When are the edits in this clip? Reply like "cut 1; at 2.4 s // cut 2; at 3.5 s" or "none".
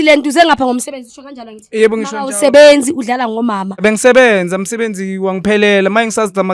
cut 1; at 3.7 s